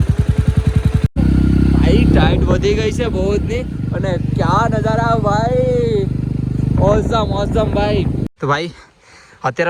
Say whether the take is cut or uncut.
cut